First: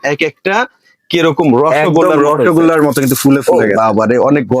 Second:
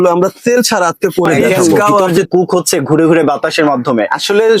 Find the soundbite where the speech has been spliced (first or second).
second